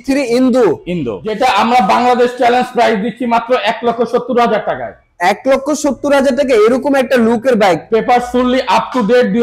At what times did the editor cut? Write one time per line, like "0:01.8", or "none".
0:01.2